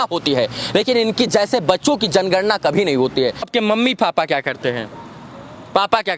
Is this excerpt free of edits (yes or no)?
no